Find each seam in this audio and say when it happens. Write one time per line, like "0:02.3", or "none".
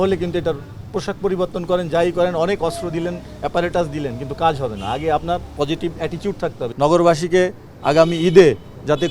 0:06.6